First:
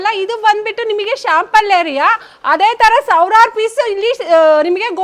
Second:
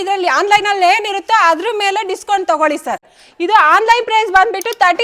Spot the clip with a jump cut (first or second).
second